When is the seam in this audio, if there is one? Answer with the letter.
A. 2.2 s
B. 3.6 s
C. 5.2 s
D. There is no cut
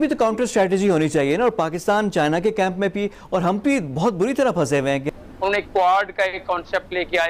C